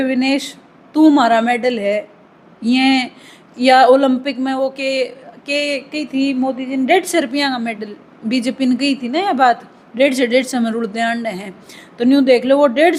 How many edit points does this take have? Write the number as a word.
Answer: zero